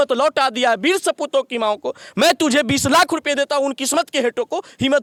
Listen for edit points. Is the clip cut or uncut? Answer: uncut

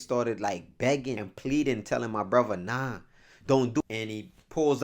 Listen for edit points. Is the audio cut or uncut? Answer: cut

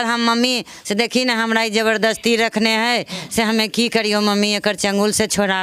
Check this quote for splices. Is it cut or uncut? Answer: uncut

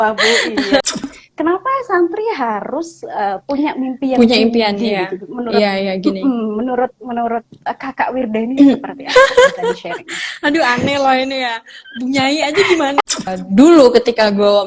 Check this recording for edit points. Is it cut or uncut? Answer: cut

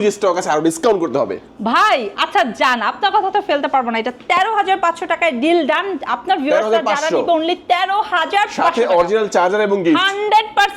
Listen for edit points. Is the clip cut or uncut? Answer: uncut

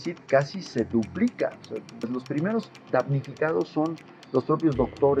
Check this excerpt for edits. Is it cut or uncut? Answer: cut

